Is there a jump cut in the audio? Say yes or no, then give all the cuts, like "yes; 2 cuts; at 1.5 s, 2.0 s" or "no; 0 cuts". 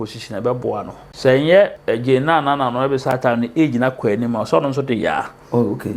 yes; 2 cuts; at 1.0 s, 1.8 s